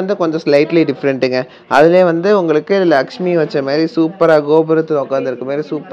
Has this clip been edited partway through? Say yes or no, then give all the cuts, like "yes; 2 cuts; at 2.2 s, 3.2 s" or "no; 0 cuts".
no; 0 cuts